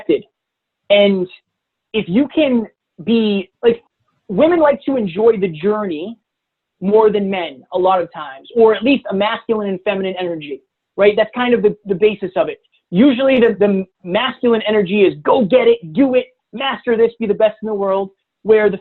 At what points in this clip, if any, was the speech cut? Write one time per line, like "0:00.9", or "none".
0:03.5